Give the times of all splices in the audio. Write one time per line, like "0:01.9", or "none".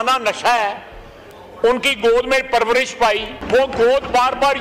0:03.3